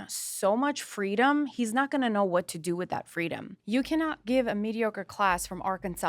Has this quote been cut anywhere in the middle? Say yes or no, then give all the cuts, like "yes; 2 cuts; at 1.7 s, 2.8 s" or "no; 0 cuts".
yes; 1 cut; at 3.5 s